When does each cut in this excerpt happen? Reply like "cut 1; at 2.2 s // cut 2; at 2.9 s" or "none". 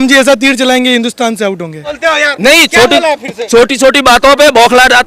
cut 1; at 2.0 s